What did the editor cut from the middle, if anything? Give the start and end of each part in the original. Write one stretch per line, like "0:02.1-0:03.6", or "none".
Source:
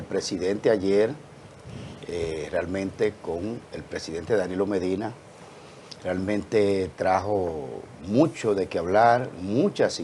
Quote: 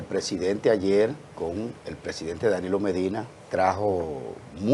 0:01.3-0:03.2
0:05.3-0:06.9